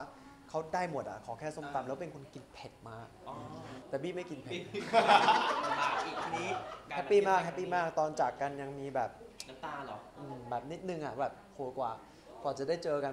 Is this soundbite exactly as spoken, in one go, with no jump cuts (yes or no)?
no